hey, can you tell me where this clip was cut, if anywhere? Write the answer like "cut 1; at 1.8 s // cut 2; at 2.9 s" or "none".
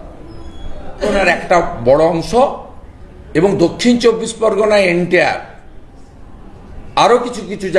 cut 1; at 1.1 s